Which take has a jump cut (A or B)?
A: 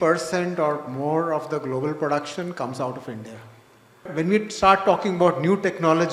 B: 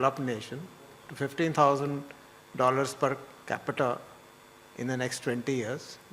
A